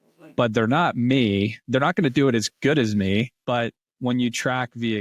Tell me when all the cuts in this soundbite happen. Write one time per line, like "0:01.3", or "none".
0:01.6
0:03.4